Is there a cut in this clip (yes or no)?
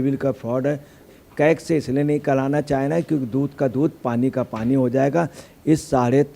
yes